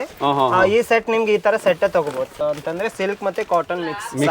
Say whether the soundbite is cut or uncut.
cut